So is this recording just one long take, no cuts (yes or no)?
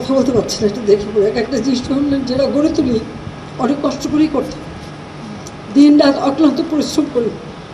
yes